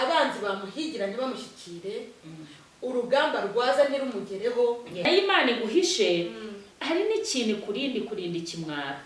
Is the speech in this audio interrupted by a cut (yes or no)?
yes